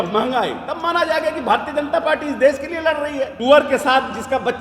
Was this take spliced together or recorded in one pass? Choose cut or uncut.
cut